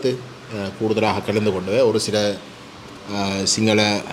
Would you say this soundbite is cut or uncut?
uncut